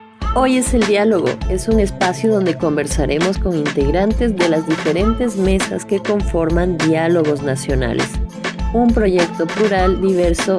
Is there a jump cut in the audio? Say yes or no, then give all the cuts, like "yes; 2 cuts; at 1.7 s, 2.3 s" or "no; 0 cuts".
no; 0 cuts